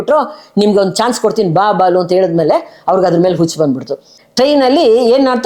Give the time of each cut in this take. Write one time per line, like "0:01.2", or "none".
0:04.1